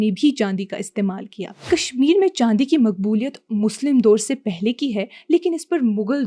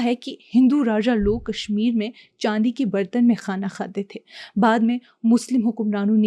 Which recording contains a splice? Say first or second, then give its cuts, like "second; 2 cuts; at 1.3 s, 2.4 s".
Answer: first; 1 cut; at 1.6 s